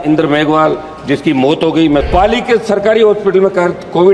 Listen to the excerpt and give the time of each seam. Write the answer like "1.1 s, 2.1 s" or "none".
2.1 s